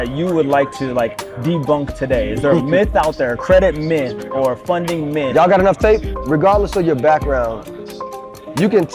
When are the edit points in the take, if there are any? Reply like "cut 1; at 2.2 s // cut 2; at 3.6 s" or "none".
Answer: cut 1; at 6.1 s

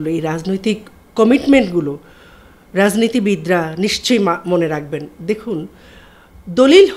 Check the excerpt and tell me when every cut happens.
none

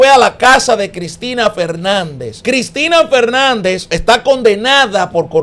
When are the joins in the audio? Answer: cut 1; at 2.3 s // cut 2; at 3.9 s

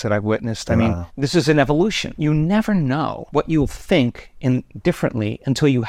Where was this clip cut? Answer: cut 1; at 1.1 s // cut 2; at 2.2 s // cut 3; at 3.2 s

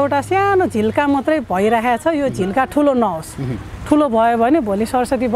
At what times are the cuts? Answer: none

